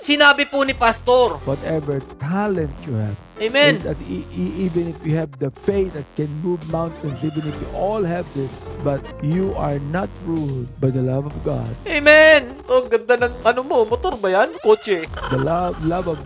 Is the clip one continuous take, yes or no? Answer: no